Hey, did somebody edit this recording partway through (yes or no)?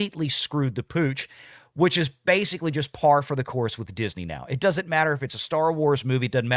no